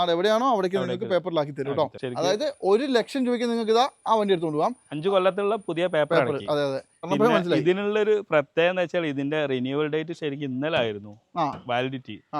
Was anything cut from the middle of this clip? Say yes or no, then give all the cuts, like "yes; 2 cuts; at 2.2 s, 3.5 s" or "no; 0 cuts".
yes; 2 cuts; at 2.0 s, 7.1 s